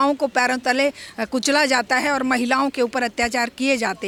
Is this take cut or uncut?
uncut